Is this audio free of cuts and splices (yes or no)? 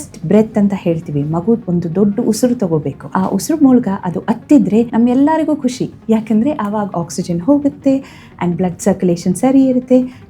no